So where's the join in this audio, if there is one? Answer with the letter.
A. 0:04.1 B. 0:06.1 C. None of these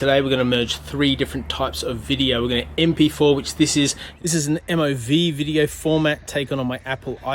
A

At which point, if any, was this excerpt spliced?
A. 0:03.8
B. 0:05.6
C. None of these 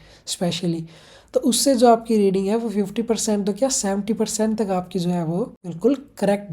B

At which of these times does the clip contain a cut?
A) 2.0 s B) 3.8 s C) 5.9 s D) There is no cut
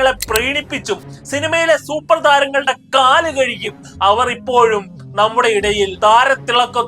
C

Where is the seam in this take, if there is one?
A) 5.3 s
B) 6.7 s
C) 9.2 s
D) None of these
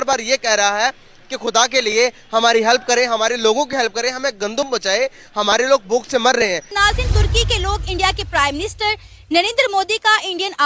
B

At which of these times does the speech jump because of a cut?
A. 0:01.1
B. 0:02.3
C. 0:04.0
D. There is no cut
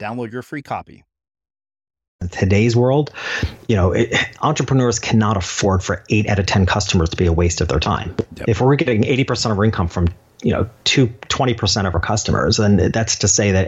B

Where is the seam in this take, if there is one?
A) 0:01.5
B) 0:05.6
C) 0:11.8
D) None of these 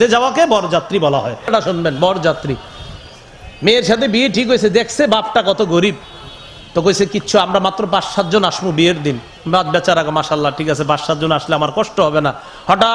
A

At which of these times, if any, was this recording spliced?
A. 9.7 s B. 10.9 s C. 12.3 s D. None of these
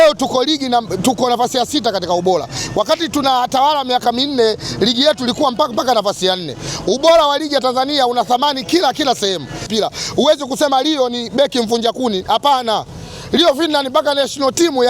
A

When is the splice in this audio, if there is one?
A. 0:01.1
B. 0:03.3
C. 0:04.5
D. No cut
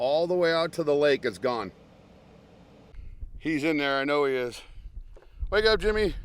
B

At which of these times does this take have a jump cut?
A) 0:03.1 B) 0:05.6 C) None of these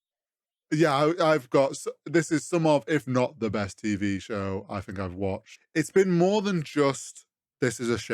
B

